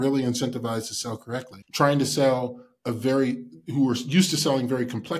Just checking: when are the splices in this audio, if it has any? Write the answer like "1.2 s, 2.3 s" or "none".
1.6 s